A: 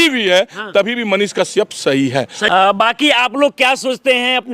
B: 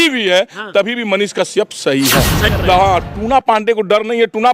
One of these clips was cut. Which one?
B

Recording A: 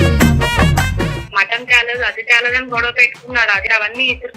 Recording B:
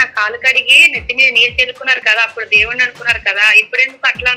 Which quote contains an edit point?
A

